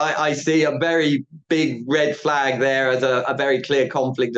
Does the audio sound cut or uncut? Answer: uncut